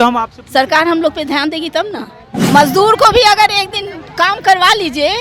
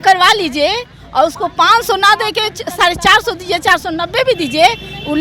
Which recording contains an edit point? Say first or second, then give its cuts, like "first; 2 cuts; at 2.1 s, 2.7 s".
first; 1 cut; at 2.3 s